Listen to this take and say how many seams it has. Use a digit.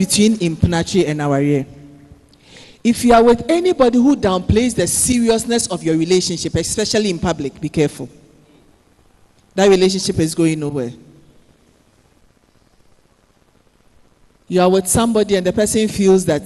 1